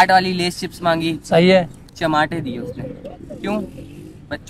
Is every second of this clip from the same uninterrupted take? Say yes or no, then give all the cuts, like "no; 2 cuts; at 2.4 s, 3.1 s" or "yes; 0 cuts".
yes; 0 cuts